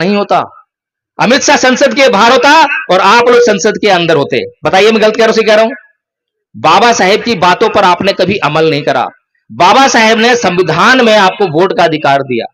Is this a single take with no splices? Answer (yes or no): yes